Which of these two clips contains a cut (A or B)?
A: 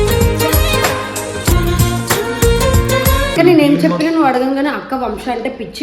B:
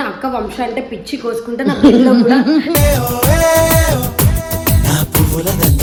A